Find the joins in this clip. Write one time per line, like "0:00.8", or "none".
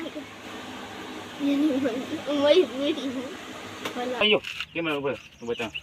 0:04.2